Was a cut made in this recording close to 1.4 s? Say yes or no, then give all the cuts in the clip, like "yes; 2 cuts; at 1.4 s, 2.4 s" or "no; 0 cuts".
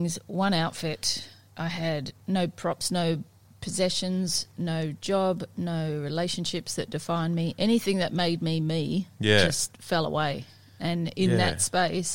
no; 0 cuts